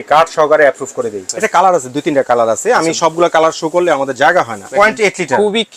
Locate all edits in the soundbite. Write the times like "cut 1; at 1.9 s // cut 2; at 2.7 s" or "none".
cut 1; at 1.2 s // cut 2; at 4.7 s